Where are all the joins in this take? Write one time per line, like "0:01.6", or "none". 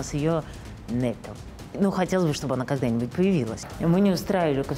0:01.6
0:03.6